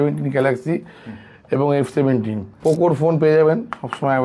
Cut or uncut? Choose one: cut